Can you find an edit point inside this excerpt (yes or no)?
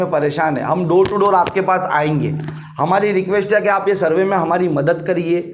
no